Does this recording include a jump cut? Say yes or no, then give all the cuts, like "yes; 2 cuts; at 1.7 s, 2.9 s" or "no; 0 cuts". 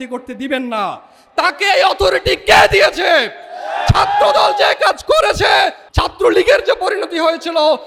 no; 0 cuts